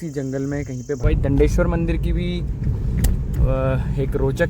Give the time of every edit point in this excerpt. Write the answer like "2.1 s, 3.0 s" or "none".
1.0 s